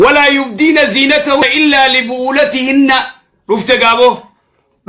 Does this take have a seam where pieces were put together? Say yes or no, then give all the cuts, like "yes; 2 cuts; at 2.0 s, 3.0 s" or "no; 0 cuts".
yes; 1 cut; at 1.4 s